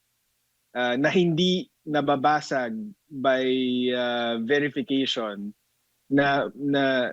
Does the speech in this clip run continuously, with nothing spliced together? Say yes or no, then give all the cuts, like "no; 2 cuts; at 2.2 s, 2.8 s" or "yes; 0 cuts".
yes; 0 cuts